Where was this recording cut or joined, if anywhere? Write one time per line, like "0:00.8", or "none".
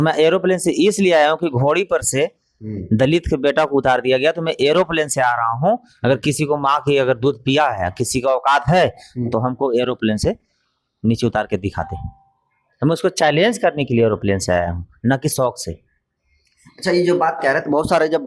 none